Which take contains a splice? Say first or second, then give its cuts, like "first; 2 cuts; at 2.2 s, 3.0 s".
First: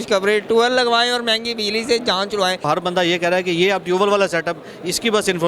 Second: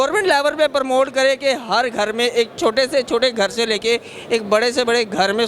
first; 1 cut; at 2.6 s